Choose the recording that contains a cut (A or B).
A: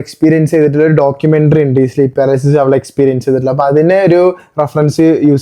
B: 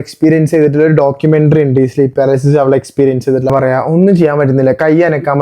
B